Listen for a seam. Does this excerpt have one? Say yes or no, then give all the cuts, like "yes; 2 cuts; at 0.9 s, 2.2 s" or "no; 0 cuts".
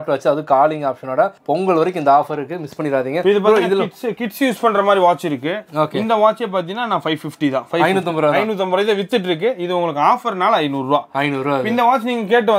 no; 0 cuts